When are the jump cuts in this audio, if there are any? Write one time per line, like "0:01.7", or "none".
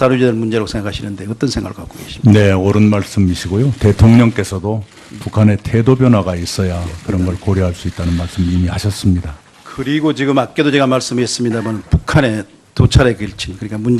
0:09.2